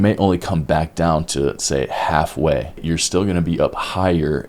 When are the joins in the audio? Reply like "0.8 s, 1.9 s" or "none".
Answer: 2.8 s

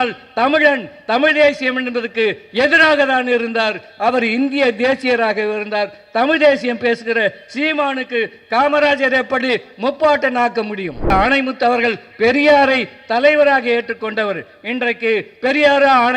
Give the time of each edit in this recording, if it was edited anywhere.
11.1 s

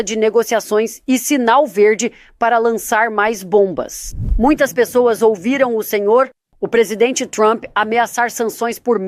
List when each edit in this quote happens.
4.2 s

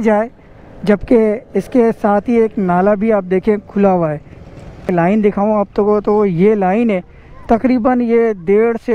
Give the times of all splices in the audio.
4.9 s

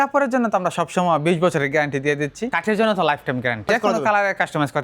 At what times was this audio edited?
2.5 s, 3.7 s

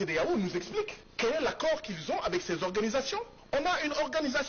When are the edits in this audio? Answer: 1.0 s, 3.3 s

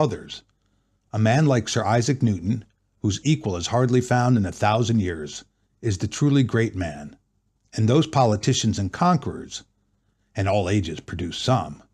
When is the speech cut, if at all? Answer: 10.3 s

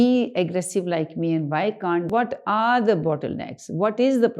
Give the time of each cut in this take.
2.1 s

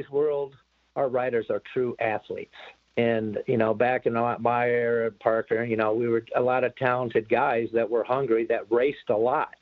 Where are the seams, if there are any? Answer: none

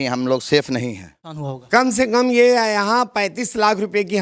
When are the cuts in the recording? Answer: 1.5 s

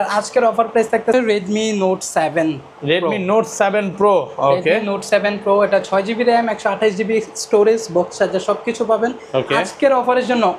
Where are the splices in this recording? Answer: 1.1 s

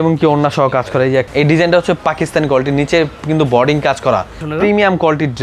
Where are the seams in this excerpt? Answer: 1.3 s, 4.4 s

